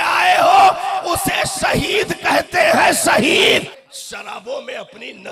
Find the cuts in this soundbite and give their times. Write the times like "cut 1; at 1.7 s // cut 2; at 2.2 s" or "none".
cut 1; at 3.8 s